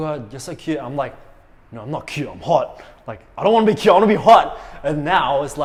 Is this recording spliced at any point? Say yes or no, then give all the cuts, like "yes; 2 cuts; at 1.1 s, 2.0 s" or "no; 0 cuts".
no; 0 cuts